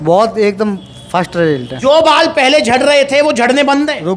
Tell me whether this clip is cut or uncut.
cut